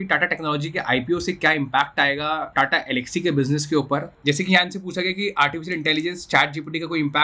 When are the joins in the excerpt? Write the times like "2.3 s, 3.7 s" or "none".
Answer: 2.5 s, 4.1 s

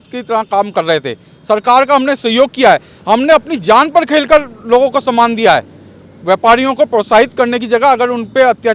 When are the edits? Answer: none

